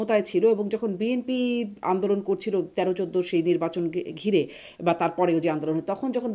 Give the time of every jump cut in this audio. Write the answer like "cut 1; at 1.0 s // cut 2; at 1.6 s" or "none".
none

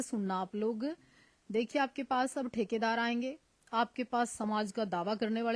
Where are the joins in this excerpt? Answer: none

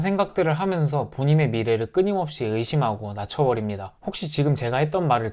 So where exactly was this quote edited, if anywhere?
cut 1; at 3.9 s

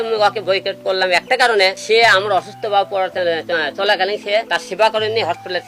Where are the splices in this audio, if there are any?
cut 1; at 1.8 s // cut 2; at 4.5 s

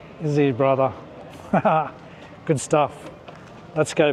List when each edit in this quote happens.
none

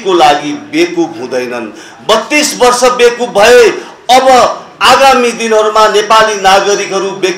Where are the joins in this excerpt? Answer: none

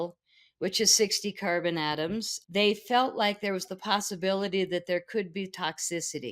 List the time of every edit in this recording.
cut 1; at 2.4 s

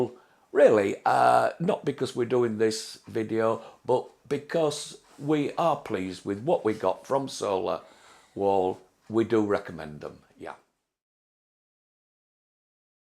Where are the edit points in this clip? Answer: none

